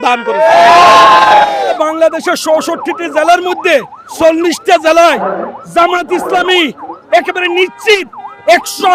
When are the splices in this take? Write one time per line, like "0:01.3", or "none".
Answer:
0:01.7